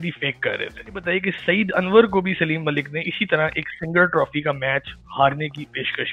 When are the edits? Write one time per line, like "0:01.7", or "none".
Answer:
0:01.1